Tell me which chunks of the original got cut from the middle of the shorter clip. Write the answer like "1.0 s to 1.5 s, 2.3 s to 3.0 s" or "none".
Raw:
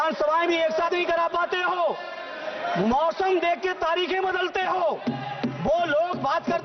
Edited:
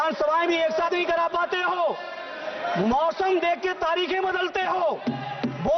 none